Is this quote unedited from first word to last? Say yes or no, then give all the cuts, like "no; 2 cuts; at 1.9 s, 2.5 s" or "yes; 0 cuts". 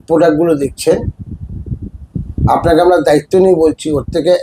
yes; 0 cuts